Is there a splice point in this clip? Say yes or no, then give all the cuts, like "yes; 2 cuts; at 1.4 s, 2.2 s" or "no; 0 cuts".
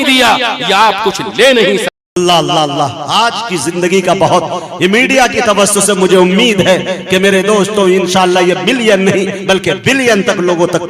yes; 1 cut; at 2.0 s